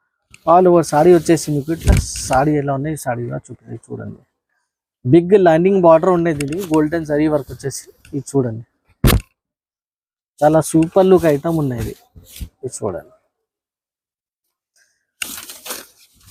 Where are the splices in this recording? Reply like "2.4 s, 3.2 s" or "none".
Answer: none

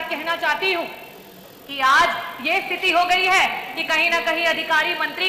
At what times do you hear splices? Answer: none

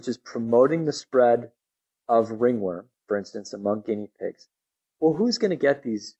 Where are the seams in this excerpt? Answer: none

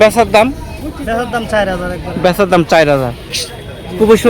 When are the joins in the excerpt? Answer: 3.4 s

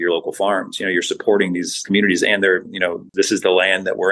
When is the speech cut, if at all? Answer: 1.8 s, 3.1 s

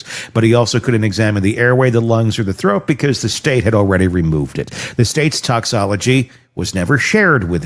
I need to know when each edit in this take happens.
none

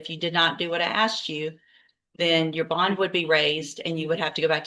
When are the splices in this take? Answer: none

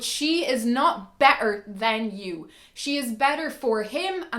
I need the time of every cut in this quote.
none

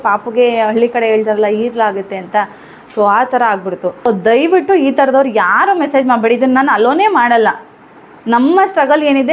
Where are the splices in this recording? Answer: 4.1 s

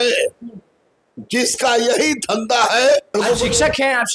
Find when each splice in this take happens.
3.1 s

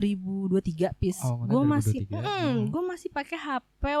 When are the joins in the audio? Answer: none

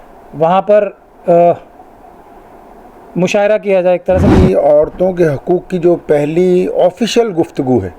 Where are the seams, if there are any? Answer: 4.3 s

